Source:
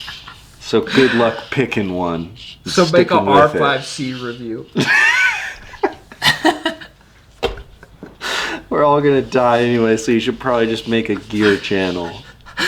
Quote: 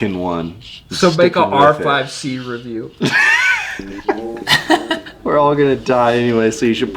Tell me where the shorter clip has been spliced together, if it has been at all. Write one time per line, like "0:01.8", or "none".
0:05.1